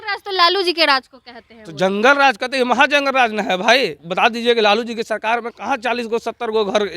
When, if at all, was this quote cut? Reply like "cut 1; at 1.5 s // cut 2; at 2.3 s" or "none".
cut 1; at 4.0 s